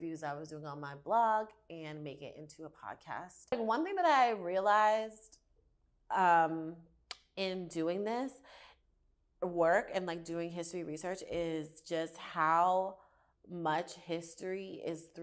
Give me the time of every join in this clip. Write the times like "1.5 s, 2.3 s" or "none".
3.5 s

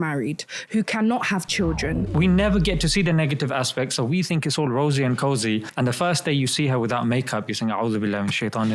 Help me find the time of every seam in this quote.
2.1 s, 5.7 s

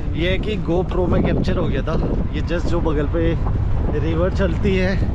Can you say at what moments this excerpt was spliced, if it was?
none

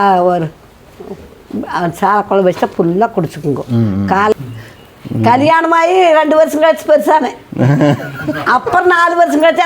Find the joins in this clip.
4.3 s

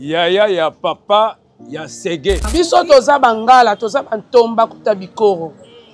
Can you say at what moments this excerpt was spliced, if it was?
2.5 s

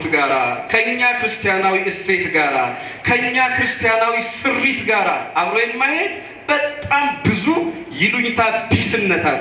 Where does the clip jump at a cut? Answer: none

